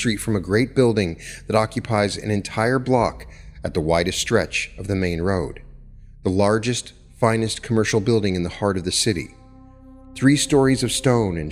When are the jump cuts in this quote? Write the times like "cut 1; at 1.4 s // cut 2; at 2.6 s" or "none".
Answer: none